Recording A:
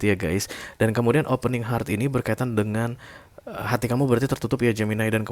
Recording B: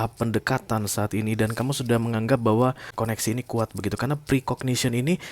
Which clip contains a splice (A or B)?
B